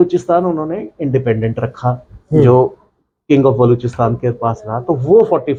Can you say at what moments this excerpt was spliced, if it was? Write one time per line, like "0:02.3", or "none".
none